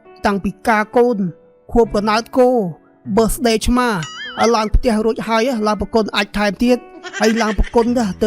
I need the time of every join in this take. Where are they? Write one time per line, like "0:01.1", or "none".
0:07.0